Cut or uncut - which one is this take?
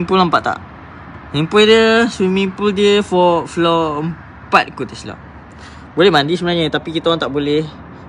uncut